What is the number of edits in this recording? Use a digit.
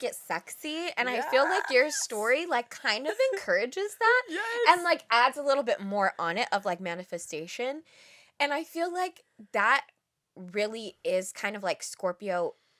0